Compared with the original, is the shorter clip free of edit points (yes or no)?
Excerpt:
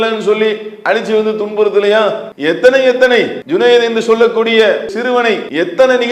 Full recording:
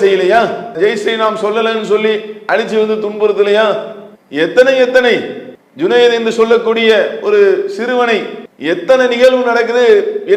no